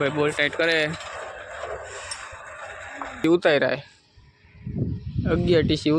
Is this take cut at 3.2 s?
yes; 1 cut; at 3.2 s

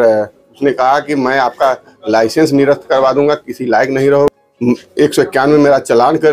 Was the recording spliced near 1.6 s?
no; 1 cut; at 4.3 s

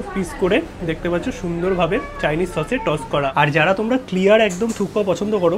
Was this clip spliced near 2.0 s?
no; 1 cut; at 3.3 s

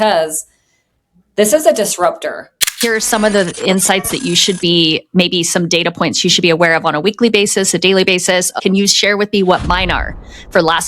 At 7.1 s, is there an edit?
no; 2 cuts; at 2.8 s, 8.5 s

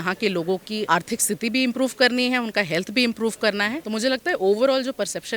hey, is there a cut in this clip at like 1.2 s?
no; 1 cut; at 3.8 s

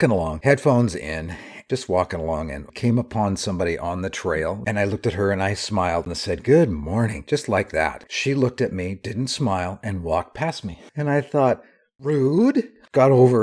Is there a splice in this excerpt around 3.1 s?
no; 5 cuts; at 1.6 s, 4.6 s, 6.1 s, 8.1 s, 10.9 s

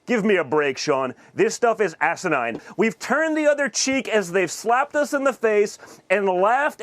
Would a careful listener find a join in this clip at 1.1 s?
no; 1 cut; at 2.6 s

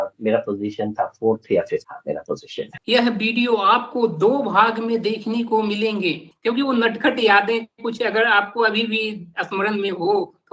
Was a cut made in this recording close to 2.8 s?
yes; 2 cuts; at 2.8 s, 6.3 s

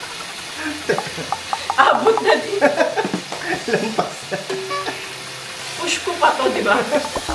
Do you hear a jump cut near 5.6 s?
yes; 1 cut; at 5.6 s

